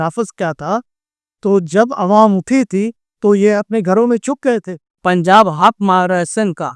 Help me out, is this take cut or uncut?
cut